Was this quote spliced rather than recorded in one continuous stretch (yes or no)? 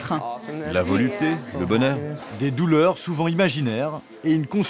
yes